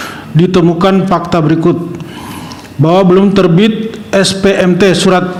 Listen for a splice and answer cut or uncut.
uncut